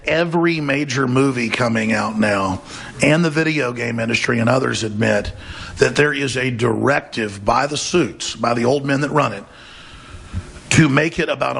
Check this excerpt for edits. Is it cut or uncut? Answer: uncut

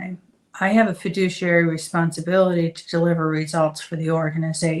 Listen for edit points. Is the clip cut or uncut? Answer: uncut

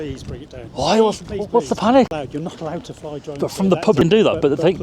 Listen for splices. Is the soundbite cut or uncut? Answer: cut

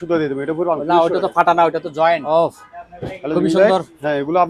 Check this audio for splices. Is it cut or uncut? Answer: cut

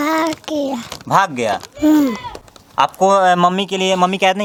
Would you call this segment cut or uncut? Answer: uncut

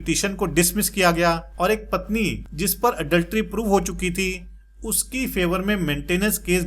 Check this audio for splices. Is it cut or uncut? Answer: cut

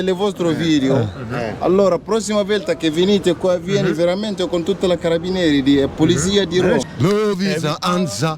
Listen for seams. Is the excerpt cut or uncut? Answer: cut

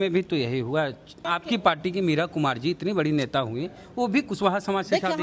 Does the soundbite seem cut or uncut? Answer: cut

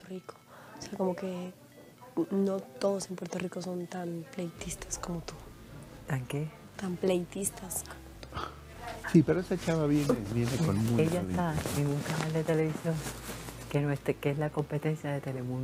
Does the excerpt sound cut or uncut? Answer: cut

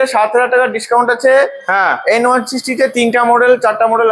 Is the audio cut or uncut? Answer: uncut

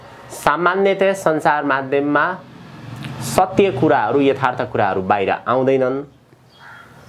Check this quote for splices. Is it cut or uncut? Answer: uncut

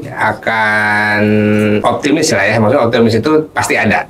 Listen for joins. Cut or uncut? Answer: cut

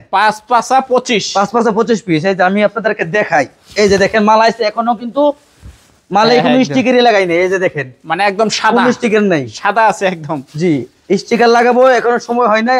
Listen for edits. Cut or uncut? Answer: uncut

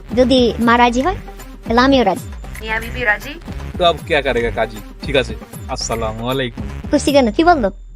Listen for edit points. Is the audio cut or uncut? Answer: cut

